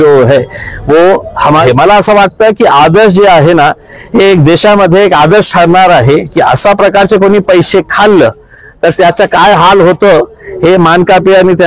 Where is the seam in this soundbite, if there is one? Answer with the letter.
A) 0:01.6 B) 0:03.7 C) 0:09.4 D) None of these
A